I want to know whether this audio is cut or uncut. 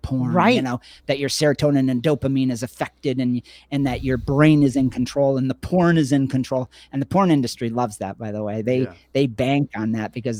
uncut